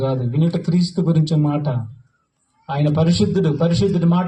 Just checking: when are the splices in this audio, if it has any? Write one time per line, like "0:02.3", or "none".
none